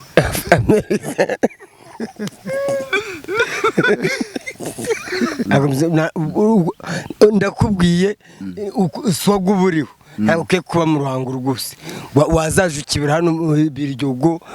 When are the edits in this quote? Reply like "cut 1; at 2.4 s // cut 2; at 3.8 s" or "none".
cut 1; at 5.4 s